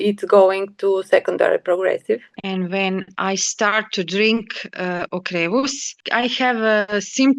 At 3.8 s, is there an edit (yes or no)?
no